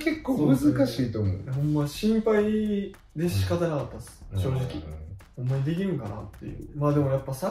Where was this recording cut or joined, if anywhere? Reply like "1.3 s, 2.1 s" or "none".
6.6 s